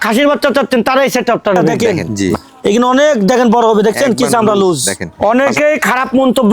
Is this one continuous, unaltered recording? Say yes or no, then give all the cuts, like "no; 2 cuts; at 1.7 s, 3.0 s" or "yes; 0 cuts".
no; 2 cuts; at 1.7 s, 5.1 s